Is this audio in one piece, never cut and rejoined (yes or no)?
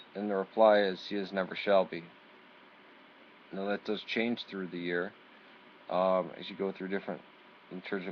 no